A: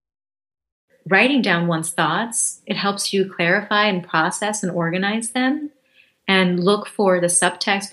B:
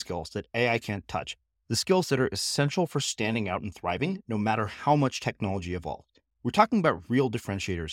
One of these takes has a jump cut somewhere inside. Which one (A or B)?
A